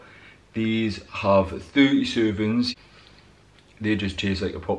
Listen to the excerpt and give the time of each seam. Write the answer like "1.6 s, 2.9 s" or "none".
2.7 s